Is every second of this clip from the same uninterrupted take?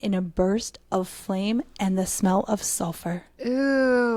yes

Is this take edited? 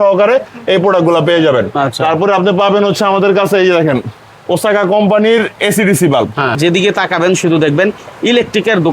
yes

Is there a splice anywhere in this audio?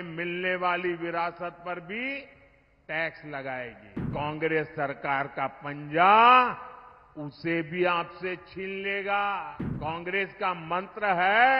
yes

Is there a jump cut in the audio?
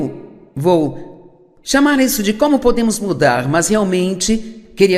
no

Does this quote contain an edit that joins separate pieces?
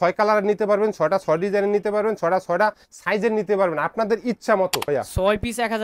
yes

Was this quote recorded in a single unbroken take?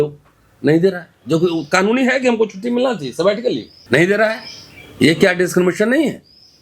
no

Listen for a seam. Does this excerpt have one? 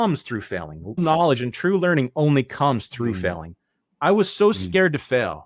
yes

